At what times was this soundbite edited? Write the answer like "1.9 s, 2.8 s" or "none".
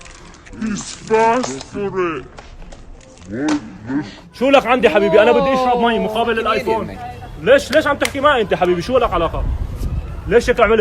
none